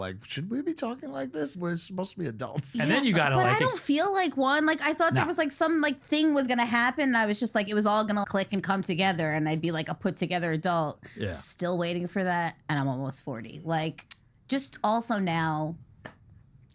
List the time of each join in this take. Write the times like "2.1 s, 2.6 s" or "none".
1.5 s, 8.2 s